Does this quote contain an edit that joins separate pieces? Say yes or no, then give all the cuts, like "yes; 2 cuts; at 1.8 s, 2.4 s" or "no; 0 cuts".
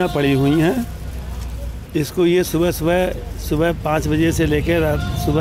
no; 0 cuts